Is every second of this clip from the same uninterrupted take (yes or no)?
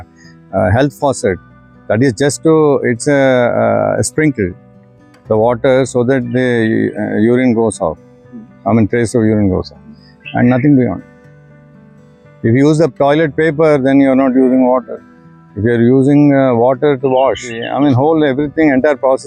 no